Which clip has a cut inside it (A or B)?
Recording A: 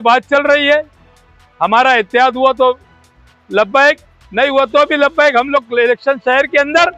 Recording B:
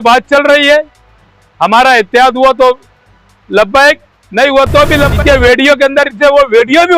B